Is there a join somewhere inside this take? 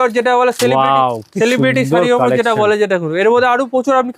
no; 0 cuts

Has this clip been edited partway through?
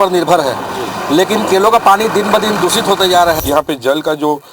yes; 1 cut; at 3.4 s

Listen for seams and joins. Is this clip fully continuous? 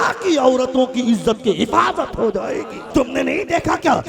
no; 1 cut; at 2.8 s

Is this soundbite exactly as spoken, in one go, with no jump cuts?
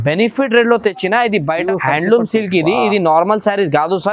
no; 1 cut; at 1.6 s

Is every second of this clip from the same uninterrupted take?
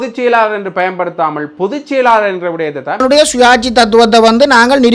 no; 1 cut; at 3.0 s

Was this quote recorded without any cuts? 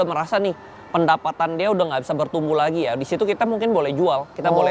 yes; 0 cuts

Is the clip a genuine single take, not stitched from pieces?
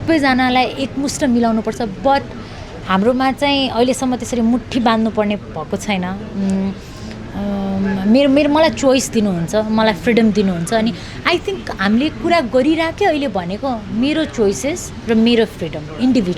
yes; 0 cuts

